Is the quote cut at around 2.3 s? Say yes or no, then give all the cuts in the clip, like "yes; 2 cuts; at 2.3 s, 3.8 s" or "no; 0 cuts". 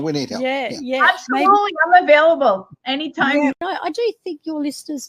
no; 1 cut; at 3.6 s